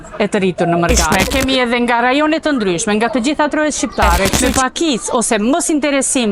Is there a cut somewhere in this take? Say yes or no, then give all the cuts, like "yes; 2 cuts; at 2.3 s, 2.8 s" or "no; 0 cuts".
yes; 2 cuts; at 1.1 s, 4.4 s